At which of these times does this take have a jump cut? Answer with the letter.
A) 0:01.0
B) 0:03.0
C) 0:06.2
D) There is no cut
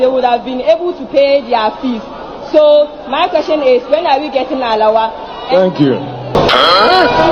C